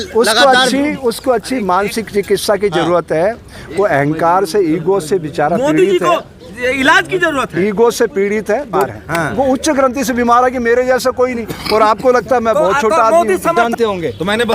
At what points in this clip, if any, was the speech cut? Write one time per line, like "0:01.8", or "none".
0:08.8
0:13.6